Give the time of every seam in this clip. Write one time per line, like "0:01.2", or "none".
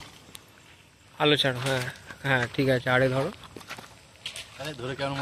none